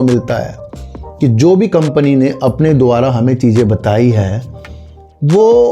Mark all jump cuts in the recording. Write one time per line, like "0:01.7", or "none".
none